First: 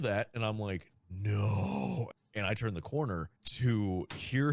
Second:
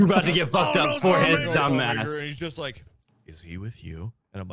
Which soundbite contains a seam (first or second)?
first